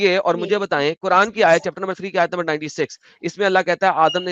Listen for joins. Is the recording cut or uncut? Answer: uncut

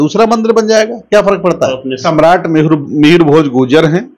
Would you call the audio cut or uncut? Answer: cut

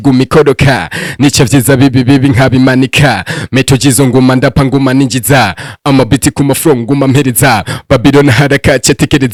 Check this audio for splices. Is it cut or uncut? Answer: uncut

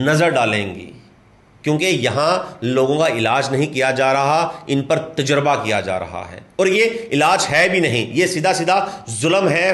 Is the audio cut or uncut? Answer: uncut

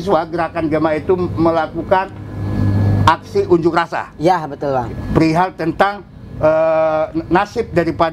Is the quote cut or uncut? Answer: uncut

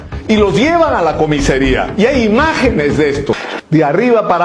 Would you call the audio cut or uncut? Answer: cut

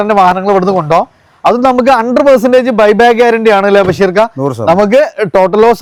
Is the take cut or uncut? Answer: uncut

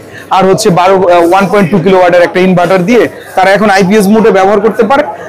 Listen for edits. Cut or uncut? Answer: uncut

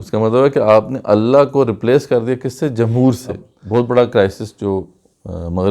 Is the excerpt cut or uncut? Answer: cut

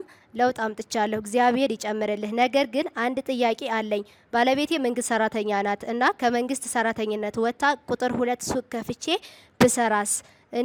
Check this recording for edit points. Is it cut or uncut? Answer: uncut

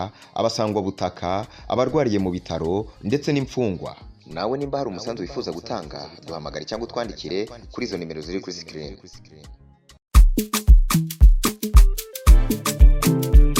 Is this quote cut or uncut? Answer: uncut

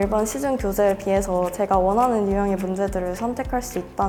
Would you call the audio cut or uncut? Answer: uncut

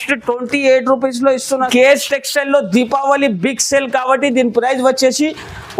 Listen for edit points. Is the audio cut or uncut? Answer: cut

